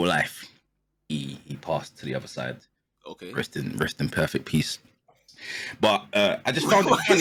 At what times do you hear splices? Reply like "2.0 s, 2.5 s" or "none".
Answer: none